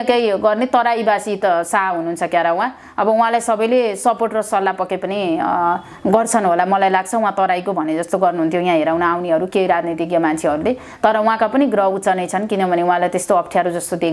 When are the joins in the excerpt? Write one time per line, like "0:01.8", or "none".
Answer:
none